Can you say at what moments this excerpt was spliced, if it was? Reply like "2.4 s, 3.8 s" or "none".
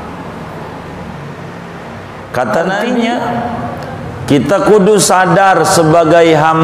2.8 s